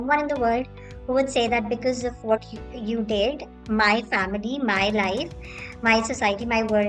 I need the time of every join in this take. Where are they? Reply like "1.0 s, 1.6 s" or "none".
none